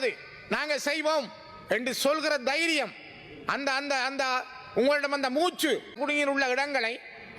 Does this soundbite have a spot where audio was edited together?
yes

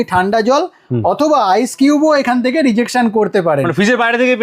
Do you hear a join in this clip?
no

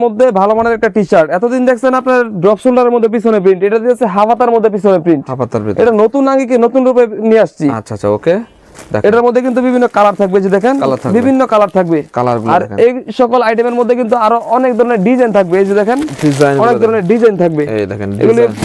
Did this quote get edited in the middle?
no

